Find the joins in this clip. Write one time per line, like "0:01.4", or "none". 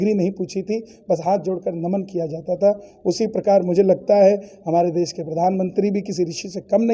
none